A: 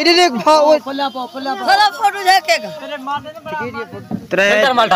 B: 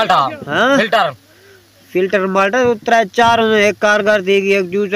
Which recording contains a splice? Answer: A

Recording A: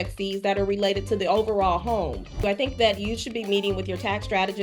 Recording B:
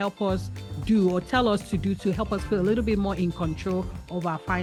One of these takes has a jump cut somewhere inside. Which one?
A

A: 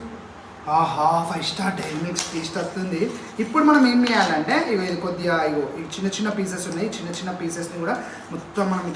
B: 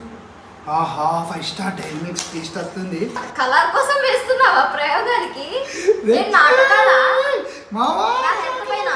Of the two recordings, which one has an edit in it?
B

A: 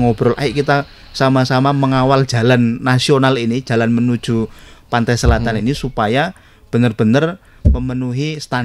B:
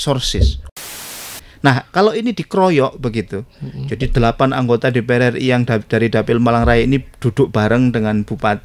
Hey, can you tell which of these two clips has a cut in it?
B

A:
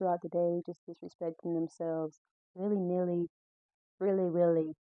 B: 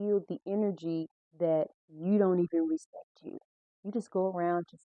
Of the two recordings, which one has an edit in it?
B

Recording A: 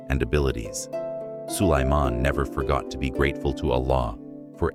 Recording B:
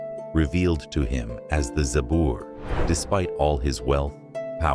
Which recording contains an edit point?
B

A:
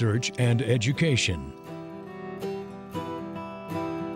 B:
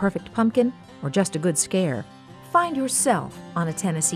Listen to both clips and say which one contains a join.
A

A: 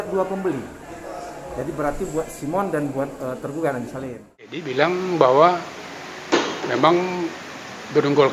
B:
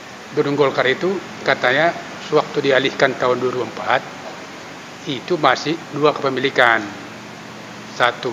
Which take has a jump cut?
A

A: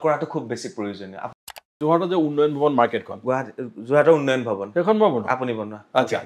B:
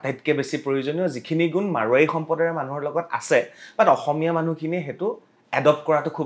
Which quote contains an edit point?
A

